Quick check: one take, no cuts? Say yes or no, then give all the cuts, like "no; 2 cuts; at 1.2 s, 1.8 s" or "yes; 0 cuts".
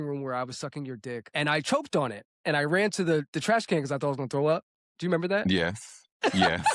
no; 2 cuts; at 1.3 s, 3.3 s